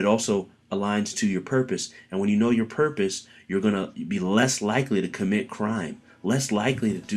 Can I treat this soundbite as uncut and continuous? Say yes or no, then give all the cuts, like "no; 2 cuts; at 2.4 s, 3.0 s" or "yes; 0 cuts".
yes; 0 cuts